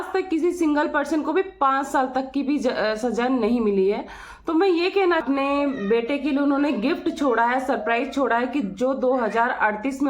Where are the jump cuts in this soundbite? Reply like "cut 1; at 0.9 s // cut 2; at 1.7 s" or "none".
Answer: cut 1; at 5.2 s

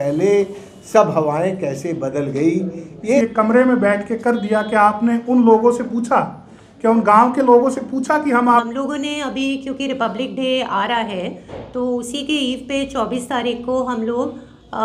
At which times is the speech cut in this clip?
cut 1; at 3.2 s // cut 2; at 8.4 s

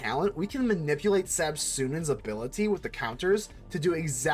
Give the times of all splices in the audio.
none

